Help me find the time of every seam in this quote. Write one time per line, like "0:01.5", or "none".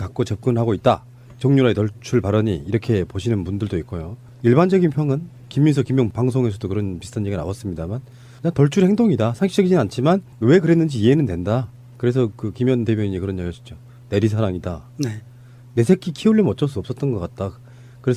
none